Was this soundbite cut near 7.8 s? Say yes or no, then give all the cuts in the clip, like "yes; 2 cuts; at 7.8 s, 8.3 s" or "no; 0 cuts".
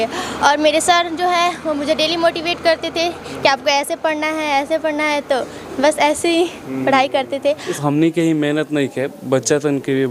yes; 1 cut; at 7.8 s